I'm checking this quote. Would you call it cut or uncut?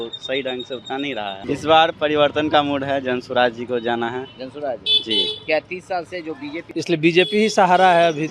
cut